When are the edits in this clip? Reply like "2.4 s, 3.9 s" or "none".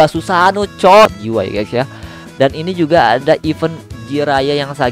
1.1 s

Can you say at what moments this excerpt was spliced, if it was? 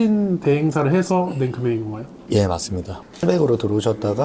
3.2 s

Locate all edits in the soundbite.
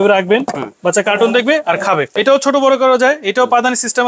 2.1 s

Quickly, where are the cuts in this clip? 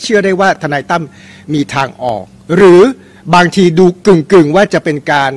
none

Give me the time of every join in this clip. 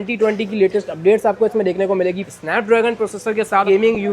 2.3 s

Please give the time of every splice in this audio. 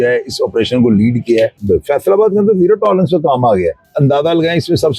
1.6 s, 3.9 s

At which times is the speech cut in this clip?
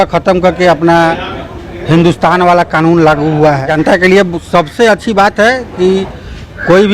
3.7 s

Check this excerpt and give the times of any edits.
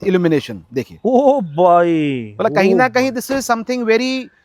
none

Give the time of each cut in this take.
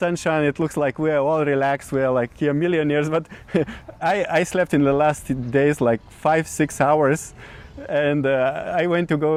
none

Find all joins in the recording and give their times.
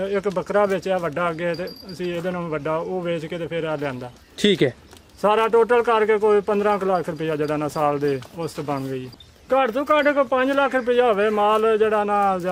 9.0 s

